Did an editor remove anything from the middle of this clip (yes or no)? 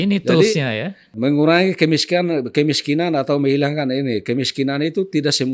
yes